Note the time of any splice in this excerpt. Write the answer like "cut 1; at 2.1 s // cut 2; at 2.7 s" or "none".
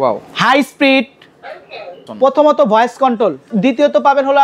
cut 1; at 2.0 s // cut 2; at 3.5 s